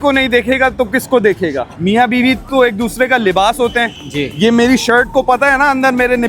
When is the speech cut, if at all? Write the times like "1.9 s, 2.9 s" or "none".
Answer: 1.7 s